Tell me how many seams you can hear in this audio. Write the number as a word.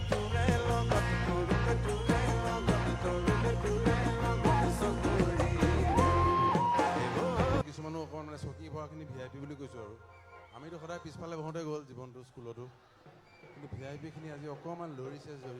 one